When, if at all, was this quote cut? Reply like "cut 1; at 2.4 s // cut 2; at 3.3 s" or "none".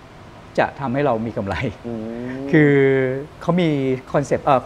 cut 1; at 3.3 s